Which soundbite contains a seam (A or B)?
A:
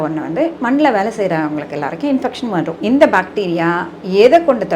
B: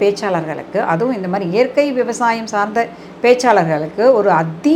A